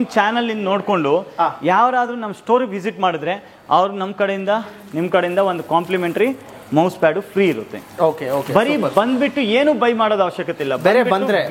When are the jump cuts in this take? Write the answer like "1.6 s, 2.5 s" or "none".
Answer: none